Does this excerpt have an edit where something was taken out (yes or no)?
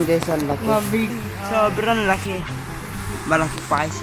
yes